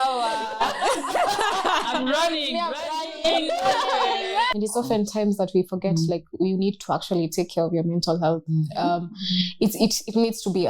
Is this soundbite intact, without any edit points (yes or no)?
no